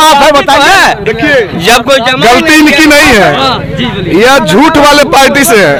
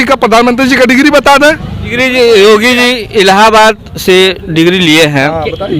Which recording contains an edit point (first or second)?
second